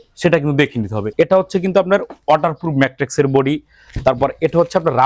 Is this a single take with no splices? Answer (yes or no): no